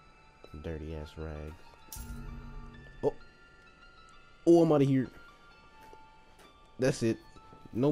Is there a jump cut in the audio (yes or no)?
no